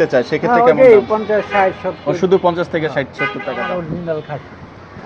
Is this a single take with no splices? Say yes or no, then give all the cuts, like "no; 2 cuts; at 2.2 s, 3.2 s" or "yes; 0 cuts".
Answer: no; 1 cut; at 3.6 s